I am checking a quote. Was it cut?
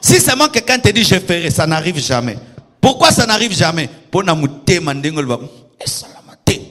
no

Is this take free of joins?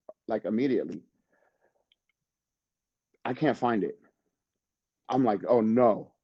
yes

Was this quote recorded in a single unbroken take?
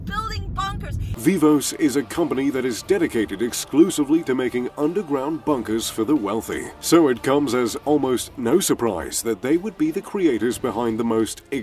no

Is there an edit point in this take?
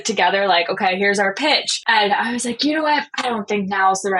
yes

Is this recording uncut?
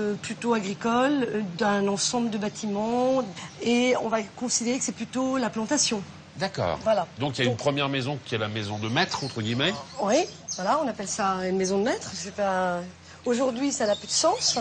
yes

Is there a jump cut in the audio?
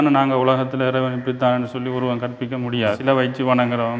yes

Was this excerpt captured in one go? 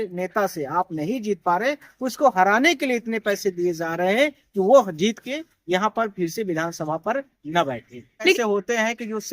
no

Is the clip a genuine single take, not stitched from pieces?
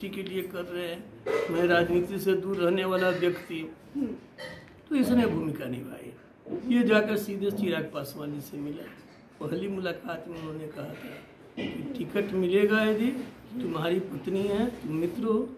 no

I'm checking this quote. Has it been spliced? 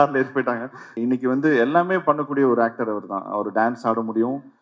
yes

